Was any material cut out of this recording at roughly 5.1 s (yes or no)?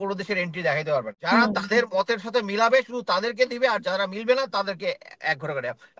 no